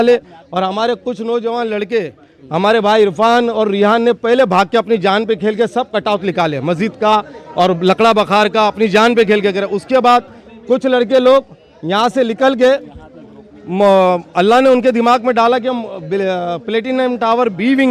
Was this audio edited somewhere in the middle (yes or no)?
no